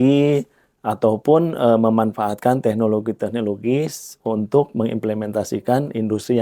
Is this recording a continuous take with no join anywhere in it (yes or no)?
yes